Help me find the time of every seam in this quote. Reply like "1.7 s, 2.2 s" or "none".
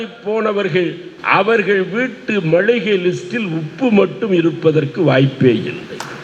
1.1 s

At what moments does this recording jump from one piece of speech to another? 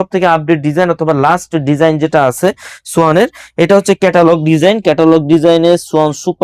none

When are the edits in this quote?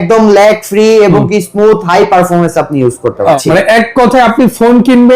3.4 s

